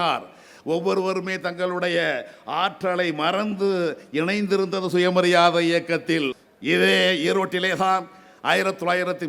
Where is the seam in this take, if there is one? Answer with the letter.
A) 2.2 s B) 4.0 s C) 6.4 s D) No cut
C